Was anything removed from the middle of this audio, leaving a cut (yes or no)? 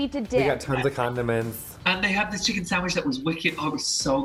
no